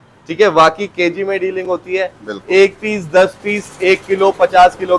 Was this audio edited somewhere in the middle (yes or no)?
no